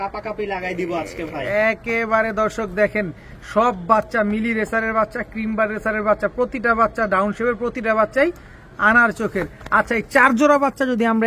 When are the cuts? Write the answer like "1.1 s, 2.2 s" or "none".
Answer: none